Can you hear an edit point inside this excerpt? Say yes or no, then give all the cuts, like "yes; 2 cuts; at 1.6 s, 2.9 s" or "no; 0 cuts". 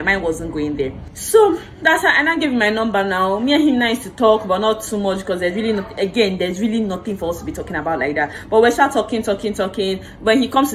no; 0 cuts